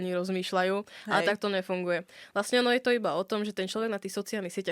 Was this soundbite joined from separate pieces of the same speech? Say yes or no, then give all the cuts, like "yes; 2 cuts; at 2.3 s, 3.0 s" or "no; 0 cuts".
no; 0 cuts